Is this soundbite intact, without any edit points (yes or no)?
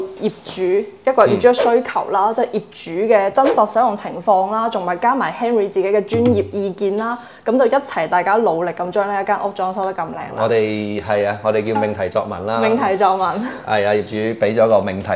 yes